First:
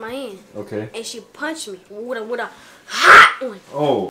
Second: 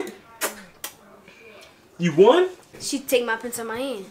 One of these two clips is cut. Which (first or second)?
second